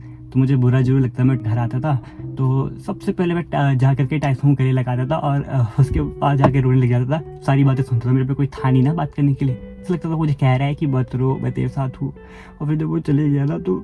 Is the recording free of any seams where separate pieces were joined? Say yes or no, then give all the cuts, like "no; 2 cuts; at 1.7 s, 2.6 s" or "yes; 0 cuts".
no; 3 cuts; at 1.4 s, 7.4 s, 9.8 s